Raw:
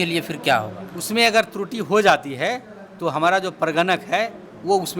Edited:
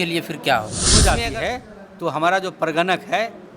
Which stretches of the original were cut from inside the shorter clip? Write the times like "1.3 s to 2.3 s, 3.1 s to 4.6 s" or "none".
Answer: 1.0 s to 2.0 s